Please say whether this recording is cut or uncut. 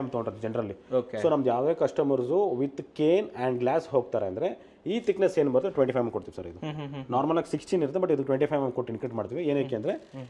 uncut